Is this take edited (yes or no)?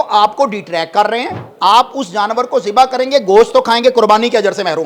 yes